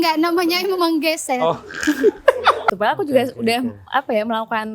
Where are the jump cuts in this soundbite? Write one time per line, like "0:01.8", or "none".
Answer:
0:02.7